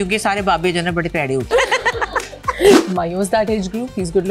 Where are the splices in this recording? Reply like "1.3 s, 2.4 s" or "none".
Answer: 1.5 s, 2.8 s